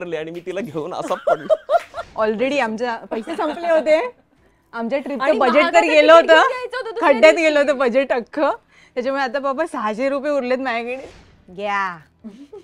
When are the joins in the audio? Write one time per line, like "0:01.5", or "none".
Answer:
0:02.0
0:11.0